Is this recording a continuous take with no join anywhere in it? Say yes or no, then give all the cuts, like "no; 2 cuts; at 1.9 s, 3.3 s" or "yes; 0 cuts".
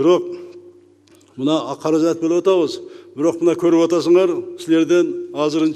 yes; 0 cuts